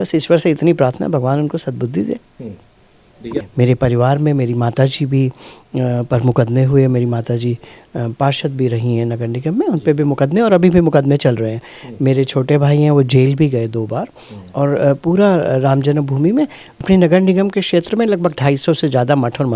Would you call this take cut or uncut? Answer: cut